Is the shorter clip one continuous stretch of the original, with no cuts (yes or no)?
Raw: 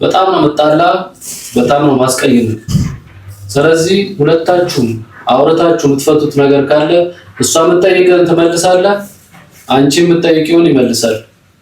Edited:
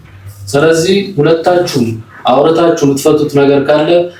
yes